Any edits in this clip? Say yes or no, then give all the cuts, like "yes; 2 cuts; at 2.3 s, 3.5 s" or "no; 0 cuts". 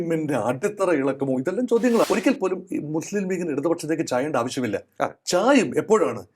yes; 1 cut; at 2.1 s